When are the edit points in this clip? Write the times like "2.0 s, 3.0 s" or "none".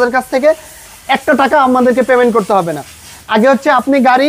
none

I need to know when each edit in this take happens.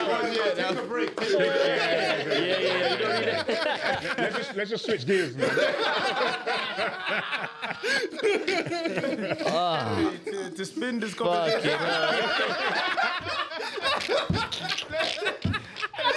none

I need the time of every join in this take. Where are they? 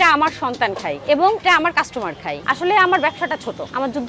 2.4 s

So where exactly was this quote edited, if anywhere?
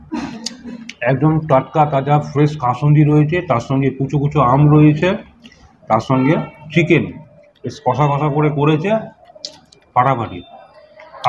none

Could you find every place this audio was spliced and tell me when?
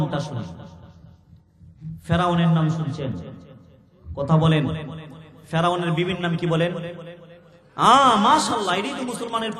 none

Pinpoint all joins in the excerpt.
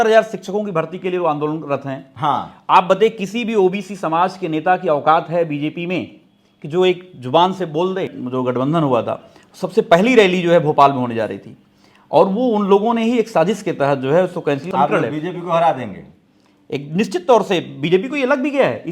8.1 s, 14.6 s

